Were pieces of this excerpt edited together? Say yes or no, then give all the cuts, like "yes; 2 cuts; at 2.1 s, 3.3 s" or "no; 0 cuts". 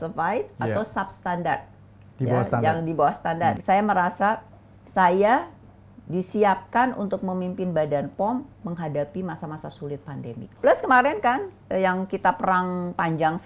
yes; 2 cuts; at 3.6 s, 10.5 s